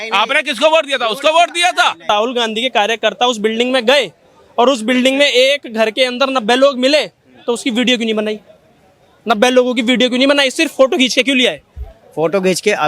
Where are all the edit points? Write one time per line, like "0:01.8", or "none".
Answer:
0:02.1

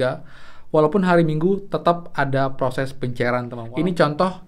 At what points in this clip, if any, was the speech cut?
0:03.6

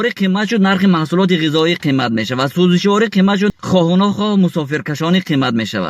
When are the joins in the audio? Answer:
0:03.5

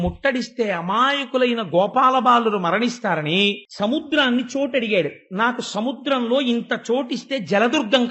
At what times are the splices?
0:03.7

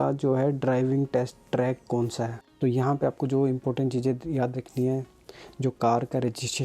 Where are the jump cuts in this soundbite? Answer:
0:02.4

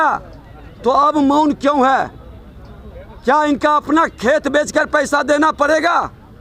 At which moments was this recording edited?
none

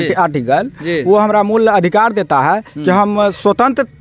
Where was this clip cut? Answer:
none

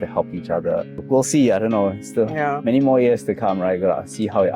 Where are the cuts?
0:01.0

